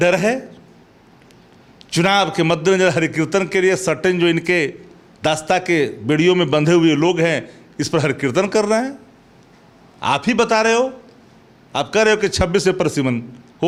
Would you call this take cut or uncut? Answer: uncut